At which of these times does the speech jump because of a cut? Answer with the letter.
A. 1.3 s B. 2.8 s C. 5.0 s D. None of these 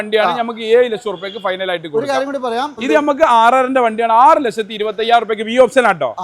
B